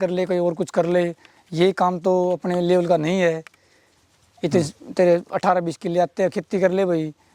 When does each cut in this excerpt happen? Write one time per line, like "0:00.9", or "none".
none